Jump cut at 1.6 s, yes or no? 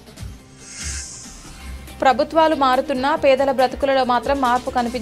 no